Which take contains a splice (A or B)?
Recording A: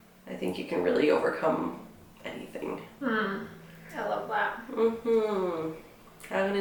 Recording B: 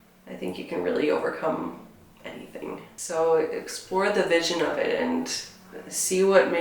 B